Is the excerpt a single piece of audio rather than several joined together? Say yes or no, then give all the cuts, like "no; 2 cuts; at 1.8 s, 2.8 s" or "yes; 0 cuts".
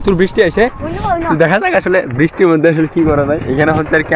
yes; 0 cuts